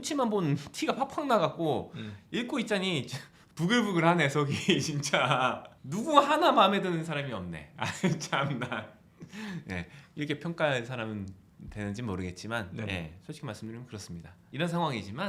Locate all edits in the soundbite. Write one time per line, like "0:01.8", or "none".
none